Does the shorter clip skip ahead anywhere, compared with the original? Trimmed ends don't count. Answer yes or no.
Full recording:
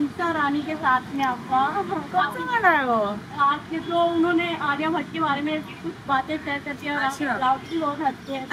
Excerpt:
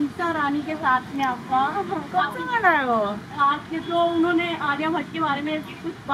no